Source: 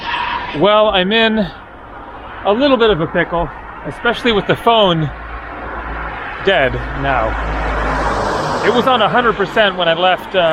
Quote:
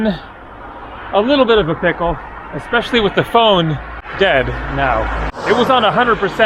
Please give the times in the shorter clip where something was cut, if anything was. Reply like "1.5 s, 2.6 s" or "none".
4.0 s, 5.4 s